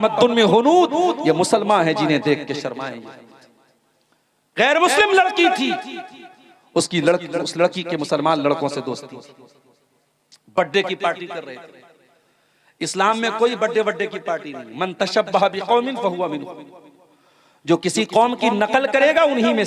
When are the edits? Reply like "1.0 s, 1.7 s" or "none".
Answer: none